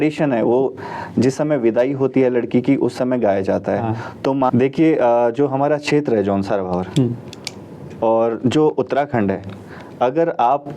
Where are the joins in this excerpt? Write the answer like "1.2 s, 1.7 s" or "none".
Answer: 4.5 s